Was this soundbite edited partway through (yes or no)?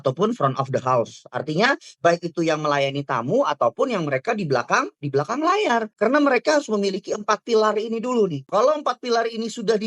yes